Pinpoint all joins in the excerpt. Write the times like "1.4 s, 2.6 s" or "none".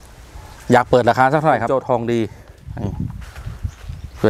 1.7 s

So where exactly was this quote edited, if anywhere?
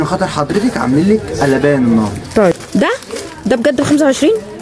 2.6 s

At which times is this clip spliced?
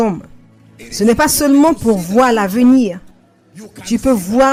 none

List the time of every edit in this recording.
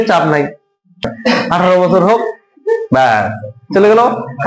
1.1 s

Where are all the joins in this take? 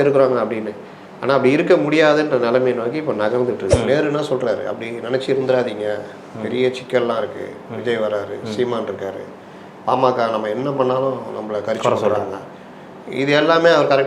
3.7 s

